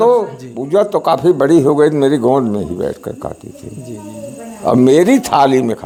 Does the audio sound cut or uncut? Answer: uncut